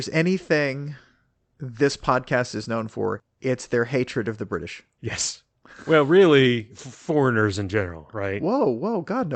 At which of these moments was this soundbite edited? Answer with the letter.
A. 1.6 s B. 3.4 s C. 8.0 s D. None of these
D